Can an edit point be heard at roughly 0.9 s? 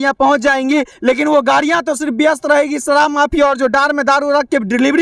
yes; 1 cut; at 0.9 s

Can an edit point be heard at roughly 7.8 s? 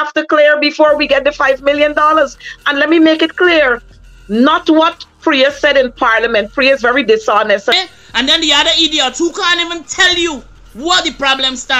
yes; 1 cut; at 7.8 s

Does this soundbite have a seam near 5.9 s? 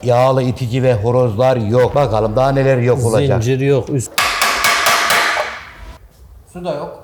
no; 2 cuts; at 1.9 s, 4.1 s

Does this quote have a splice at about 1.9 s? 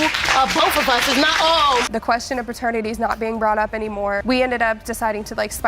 yes; 1 cut; at 1.9 s

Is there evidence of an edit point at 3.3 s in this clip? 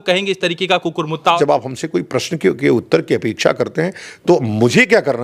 no; 1 cut; at 1.4 s

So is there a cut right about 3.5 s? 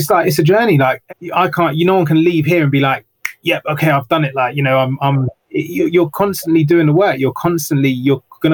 no; 1 cut; at 1.0 s

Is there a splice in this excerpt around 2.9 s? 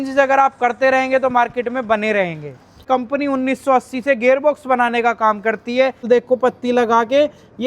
yes; 2 cuts; at 2.9 s, 6.1 s

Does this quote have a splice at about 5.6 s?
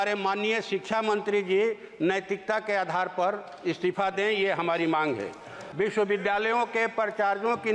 yes; 1 cut; at 5.6 s

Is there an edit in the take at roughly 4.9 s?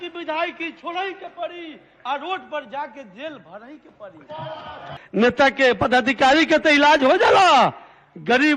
yes; 1 cut; at 4.9 s

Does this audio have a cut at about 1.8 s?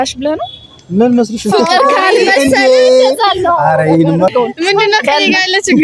no; 1 cut; at 4.3 s

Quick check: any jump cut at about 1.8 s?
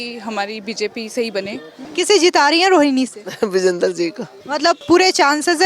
yes; 2 cuts; at 1.8 s, 4.7 s

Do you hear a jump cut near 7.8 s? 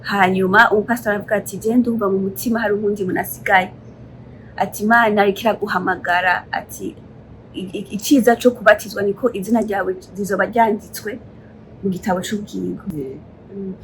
no; 1 cut; at 12.9 s

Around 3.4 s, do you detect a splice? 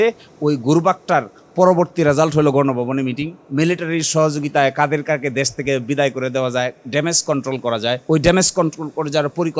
yes; 2 cuts; at 3.4 s, 8.0 s

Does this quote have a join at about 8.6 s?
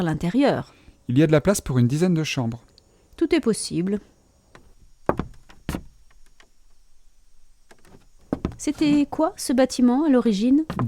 yes; 1 cut; at 8.6 s

